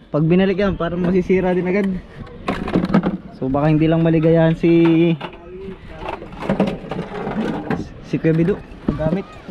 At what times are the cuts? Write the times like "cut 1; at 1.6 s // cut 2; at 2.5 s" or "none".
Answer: none